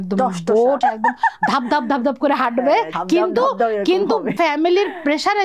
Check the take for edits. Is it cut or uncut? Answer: cut